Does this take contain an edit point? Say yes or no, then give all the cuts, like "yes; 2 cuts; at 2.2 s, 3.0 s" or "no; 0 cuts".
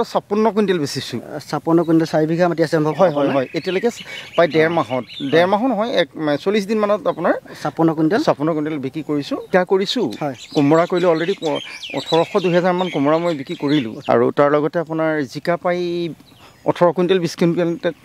yes; 2 cuts; at 9.5 s, 13.9 s